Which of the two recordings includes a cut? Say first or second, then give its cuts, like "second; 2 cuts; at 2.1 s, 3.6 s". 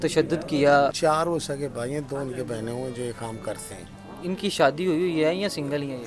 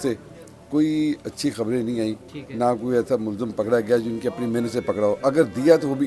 first; 2 cuts; at 0.9 s, 4.0 s